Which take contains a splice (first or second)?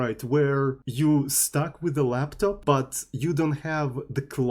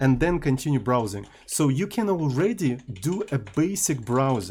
first